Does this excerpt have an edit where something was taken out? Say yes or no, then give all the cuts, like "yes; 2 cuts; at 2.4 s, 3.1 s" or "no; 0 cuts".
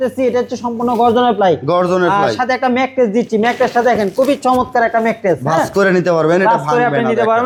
no; 0 cuts